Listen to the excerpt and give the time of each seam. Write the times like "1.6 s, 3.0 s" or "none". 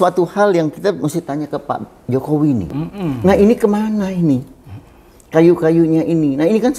2.7 s